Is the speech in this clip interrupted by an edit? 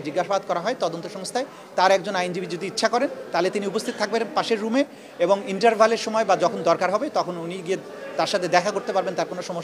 no; 0 cuts

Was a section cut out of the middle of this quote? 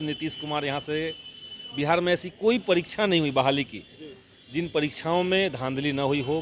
no; 0 cuts

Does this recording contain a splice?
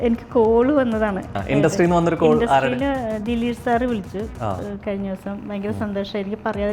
yes; 1 cut; at 1.3 s

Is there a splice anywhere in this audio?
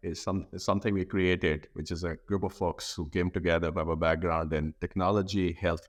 no; 0 cuts

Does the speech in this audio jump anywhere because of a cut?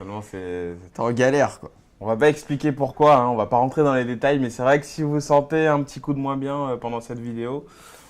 yes; 1 cut; at 4.0 s

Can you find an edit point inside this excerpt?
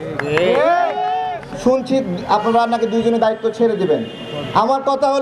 yes; 1 cut; at 1.3 s

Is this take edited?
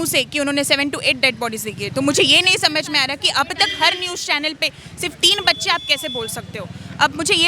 no; 0 cuts

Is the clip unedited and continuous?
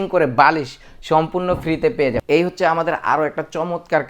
no; 1 cut; at 2.2 s

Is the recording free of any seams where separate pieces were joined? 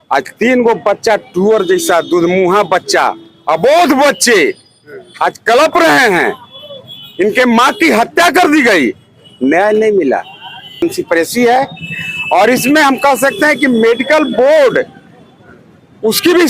no; 1 cut; at 10.8 s

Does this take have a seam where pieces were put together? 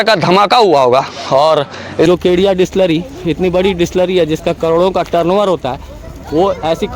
yes; 1 cut; at 2.1 s

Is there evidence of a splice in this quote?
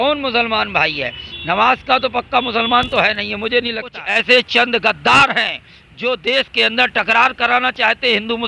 yes; 1 cut; at 4.0 s

